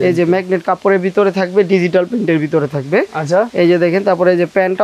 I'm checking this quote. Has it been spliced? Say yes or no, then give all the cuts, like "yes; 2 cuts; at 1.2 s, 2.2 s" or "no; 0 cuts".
no; 0 cuts